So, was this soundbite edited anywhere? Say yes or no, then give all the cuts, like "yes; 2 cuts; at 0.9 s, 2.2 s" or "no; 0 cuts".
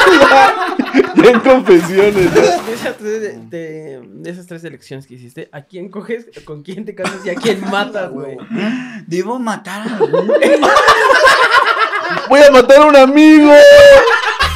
yes; 1 cut; at 2.6 s